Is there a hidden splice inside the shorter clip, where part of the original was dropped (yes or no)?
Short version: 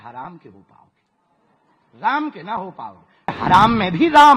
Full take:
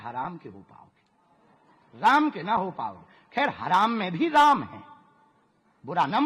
yes